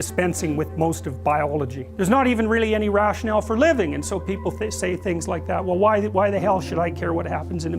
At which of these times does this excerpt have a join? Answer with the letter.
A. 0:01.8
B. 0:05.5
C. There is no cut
A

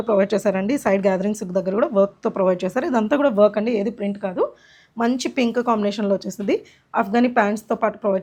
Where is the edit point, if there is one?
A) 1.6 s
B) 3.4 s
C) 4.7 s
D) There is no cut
D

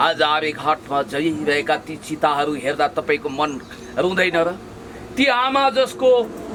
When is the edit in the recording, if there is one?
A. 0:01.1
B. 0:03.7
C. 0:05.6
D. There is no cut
D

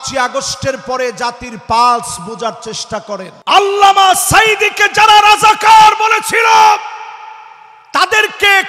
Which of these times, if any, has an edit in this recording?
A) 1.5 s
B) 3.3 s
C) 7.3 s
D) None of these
B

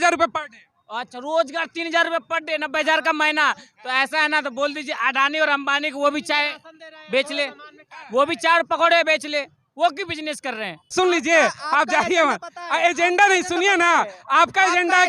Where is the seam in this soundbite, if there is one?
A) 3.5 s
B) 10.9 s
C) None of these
B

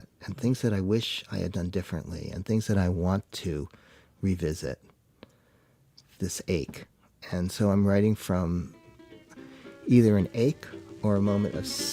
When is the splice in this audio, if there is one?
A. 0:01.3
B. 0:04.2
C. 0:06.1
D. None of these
D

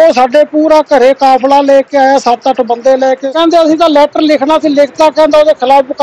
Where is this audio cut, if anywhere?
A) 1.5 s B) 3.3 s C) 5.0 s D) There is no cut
B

